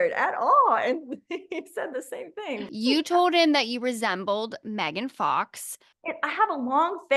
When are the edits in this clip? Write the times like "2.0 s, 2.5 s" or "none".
2.6 s